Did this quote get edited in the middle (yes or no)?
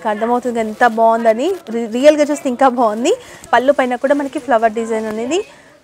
yes